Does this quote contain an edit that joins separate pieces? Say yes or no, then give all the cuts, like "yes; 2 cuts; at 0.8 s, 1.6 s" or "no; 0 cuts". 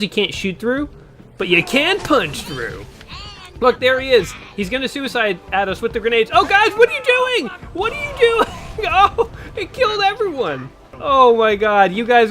yes; 1 cut; at 10.9 s